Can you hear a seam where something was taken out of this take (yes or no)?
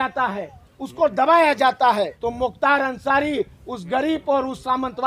yes